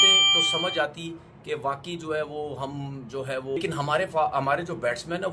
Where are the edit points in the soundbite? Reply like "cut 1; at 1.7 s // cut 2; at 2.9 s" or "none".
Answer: cut 1; at 3.6 s